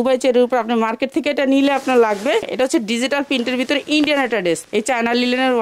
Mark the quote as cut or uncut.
cut